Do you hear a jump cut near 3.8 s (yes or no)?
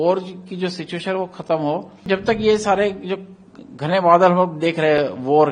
no